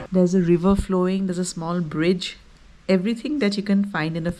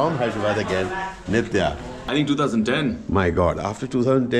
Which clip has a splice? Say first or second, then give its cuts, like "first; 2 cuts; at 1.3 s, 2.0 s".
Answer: second; 1 cut; at 2.1 s